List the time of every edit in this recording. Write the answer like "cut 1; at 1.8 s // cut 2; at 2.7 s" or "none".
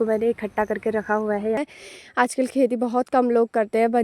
cut 1; at 1.6 s